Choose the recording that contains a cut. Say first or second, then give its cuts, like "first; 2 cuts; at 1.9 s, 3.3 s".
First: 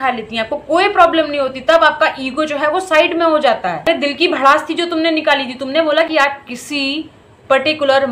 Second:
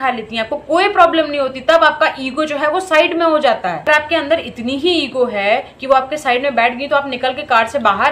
first; 2 cuts; at 3.9 s, 6.1 s